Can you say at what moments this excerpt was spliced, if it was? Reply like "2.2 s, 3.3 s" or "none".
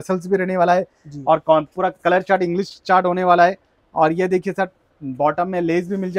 none